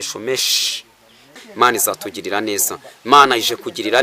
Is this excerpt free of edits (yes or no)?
no